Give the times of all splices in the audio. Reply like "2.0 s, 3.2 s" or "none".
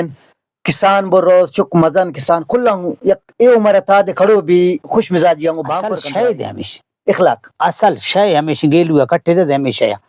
5.8 s